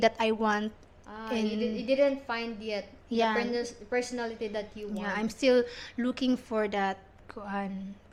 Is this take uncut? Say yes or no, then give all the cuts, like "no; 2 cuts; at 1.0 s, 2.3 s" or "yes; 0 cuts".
yes; 0 cuts